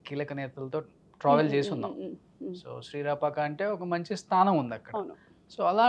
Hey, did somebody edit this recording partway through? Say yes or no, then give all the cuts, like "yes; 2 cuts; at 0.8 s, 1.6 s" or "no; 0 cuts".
no; 0 cuts